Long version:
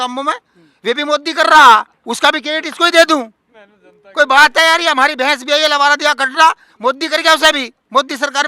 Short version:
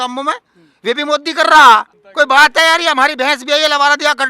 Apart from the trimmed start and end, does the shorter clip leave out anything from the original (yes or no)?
yes